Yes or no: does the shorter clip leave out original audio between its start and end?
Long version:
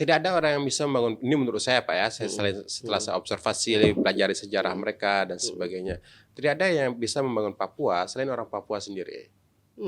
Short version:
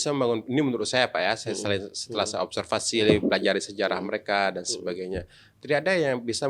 no